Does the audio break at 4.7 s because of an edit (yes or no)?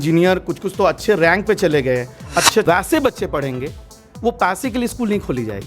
no